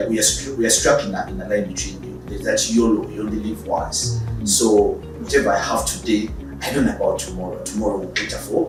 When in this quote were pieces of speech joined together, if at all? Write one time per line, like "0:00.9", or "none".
none